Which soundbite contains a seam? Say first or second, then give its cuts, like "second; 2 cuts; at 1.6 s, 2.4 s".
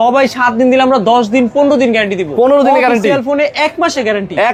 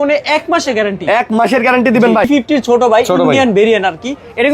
second; 1 cut; at 2.3 s